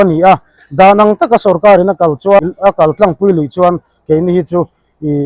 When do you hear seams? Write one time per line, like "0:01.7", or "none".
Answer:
0:02.4